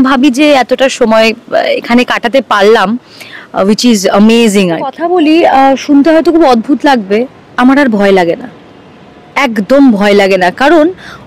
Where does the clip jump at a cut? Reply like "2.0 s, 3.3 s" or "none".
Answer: 4.9 s

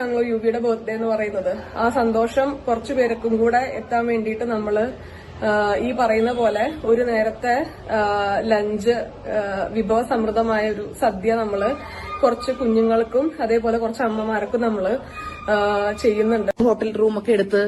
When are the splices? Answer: 16.5 s

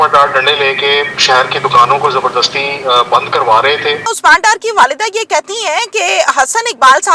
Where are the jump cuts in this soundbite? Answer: 4.1 s

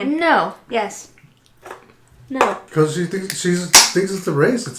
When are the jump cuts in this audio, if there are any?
2.6 s

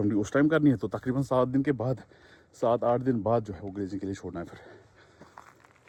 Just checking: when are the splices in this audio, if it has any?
none

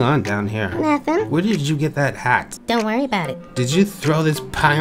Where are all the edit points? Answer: none

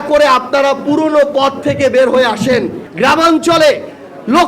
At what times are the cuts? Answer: 2.8 s

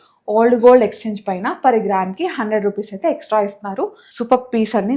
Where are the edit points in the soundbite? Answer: 4.0 s

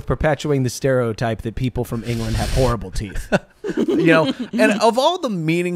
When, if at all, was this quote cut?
none

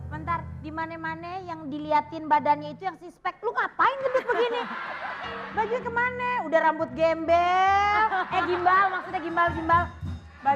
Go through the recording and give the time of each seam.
5.3 s

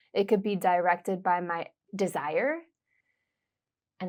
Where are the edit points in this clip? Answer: none

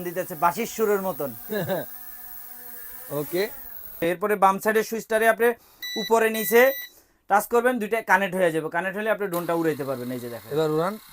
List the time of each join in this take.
4.0 s

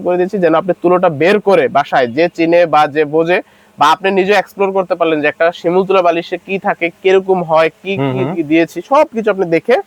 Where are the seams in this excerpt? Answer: none

